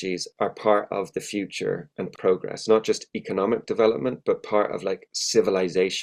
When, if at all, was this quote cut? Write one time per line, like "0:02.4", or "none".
0:02.1

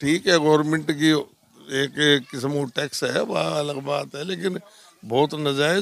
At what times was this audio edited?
none

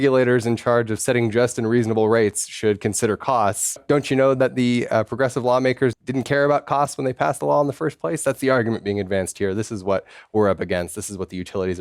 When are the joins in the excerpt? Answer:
0:03.8
0:06.0

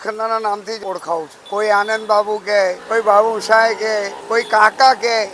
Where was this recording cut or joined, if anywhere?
0:00.9
0:02.8
0:04.2

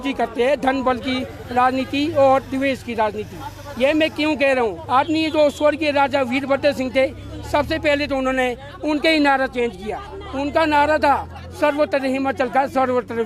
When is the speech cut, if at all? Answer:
0:04.8

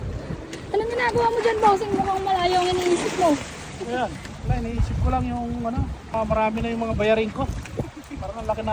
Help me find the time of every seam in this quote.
0:04.3
0:06.1

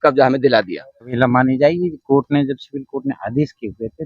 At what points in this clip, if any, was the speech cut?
0:01.1

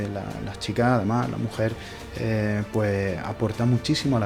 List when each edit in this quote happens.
none

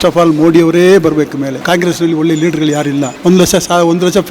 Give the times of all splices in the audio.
0:01.6
0:03.1

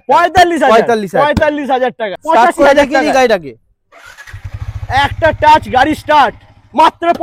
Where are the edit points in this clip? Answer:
0:02.2

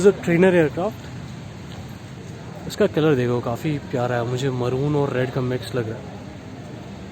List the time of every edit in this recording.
0:02.1

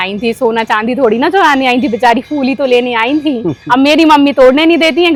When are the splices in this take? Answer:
none

